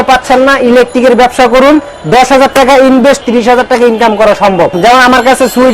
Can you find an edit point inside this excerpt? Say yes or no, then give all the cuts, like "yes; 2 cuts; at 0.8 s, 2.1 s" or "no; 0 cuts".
yes; 3 cuts; at 1.9 s, 3.2 s, 4.7 s